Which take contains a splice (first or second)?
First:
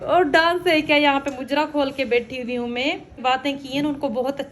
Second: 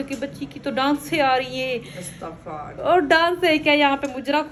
first